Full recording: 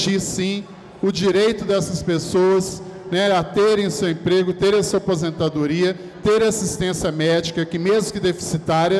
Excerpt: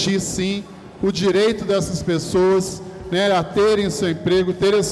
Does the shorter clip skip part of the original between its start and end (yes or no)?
no